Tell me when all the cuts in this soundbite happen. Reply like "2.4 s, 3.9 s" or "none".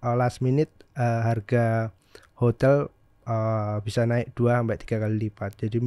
none